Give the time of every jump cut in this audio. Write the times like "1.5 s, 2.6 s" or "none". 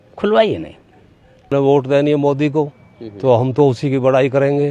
1.5 s